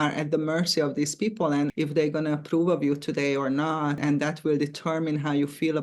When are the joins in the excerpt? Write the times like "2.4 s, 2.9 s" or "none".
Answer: 1.7 s, 4.0 s